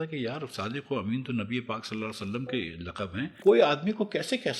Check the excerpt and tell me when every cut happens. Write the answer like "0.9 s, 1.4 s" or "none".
3.4 s